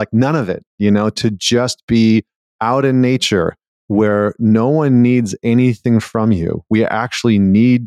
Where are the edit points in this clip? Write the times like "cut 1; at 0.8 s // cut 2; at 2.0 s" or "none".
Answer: none